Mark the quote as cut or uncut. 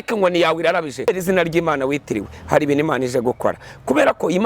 cut